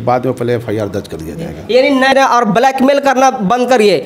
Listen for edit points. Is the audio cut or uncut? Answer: cut